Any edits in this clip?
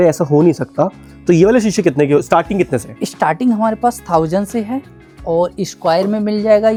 no; 0 cuts

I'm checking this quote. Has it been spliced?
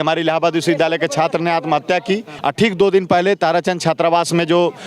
yes; 1 cut; at 2.3 s

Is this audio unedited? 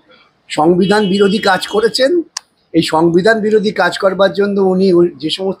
yes; 0 cuts

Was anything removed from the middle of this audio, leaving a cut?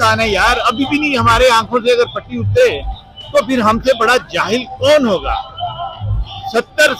no; 0 cuts

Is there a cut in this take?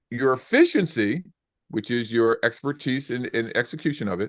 no; 0 cuts

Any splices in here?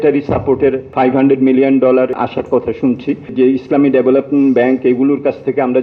yes; 3 cuts; at 0.9 s, 2.1 s, 3.3 s

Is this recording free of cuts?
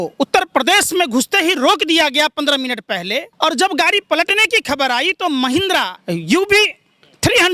no; 2 cuts; at 3.3 s, 6.0 s

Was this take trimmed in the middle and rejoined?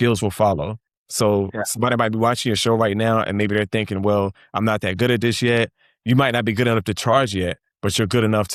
no; 0 cuts

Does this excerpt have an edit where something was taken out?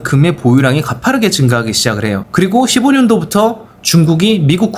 yes; 1 cut; at 2.3 s

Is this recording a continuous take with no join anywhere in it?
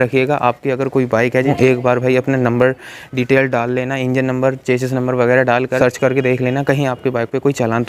no; 2 cuts; at 1.5 s, 5.8 s

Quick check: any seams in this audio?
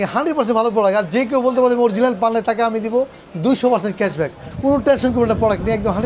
no; 0 cuts

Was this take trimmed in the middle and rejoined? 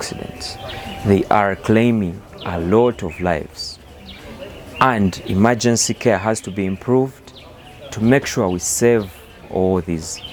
no; 0 cuts

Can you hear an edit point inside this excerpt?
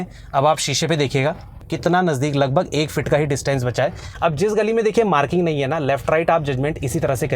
yes; 2 cuts; at 1.6 s, 4.0 s

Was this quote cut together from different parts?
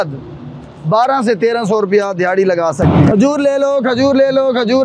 yes; 1 cut; at 2.8 s

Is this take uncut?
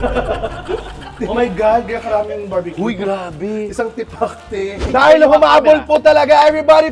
no; 1 cut; at 4.9 s

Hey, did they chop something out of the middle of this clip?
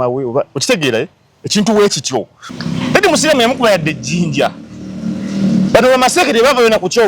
yes; 1 cut; at 2.4 s

